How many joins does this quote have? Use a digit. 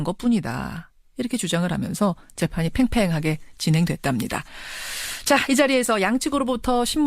1